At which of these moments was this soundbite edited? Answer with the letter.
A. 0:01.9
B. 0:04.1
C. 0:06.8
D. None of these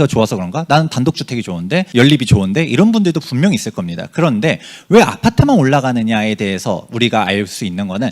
A